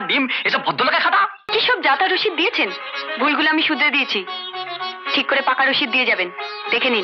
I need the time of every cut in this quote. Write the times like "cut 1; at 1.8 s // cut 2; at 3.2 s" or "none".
cut 1; at 1.4 s